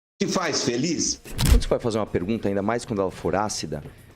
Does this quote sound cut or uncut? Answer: cut